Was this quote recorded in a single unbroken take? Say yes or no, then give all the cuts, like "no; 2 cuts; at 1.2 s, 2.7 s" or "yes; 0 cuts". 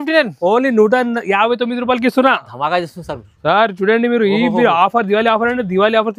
yes; 0 cuts